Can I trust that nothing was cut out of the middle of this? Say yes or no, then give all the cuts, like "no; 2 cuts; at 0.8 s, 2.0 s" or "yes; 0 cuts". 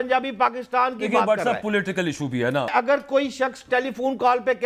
no; 1 cut; at 2.7 s